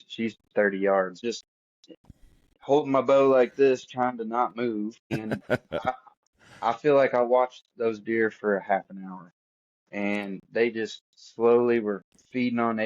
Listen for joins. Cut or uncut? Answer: cut